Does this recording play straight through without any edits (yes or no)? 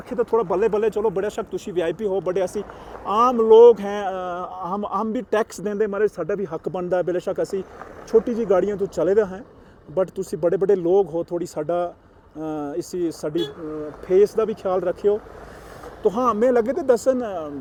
yes